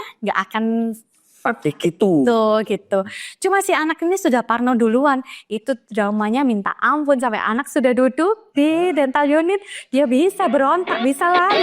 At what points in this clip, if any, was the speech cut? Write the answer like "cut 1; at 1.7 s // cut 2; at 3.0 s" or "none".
none